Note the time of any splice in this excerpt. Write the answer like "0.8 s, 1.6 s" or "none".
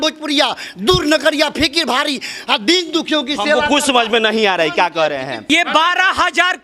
5.4 s